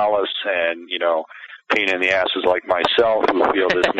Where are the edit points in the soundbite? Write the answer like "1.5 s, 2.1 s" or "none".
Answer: none